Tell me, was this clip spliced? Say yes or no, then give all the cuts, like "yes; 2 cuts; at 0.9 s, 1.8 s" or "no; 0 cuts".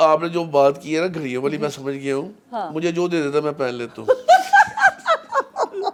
no; 0 cuts